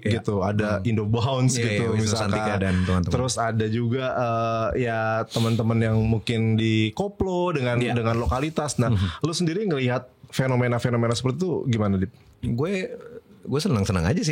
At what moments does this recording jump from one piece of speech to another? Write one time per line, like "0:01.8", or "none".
none